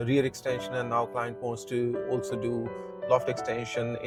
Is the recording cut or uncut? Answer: uncut